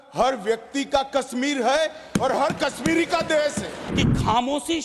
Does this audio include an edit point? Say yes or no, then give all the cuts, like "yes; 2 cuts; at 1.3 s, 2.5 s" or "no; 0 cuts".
yes; 1 cut; at 3.7 s